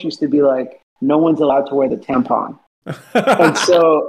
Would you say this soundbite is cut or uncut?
uncut